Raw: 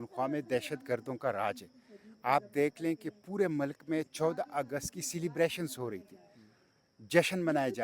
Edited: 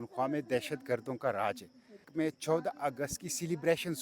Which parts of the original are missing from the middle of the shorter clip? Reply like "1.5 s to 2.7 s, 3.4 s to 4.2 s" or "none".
2.1 s to 3.8 s